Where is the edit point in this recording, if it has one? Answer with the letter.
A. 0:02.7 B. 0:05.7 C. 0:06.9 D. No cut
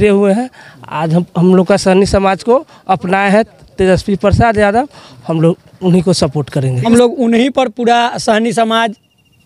C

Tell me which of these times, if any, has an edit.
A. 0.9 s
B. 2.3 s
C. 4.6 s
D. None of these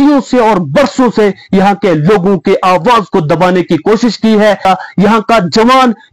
C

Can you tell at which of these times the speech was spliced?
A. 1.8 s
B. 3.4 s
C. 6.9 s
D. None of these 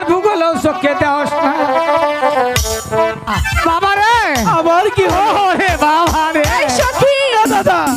B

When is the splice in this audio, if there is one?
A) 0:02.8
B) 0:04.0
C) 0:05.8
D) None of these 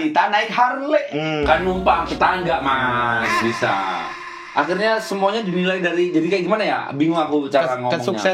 B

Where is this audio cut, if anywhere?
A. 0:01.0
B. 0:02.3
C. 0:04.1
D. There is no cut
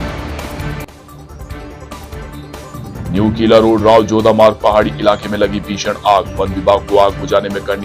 B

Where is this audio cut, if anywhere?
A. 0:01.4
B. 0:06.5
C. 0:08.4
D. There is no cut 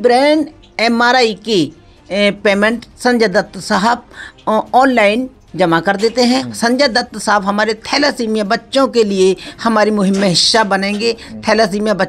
B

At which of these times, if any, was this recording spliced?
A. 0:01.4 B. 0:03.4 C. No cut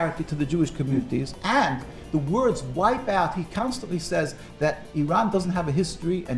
A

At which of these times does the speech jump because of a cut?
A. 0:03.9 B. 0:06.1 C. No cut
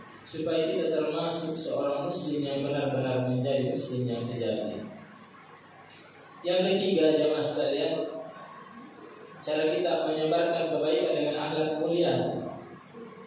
C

